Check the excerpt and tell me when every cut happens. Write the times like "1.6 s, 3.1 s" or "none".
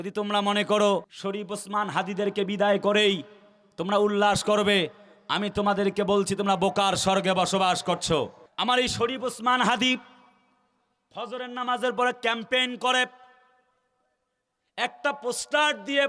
1.2 s, 8.4 s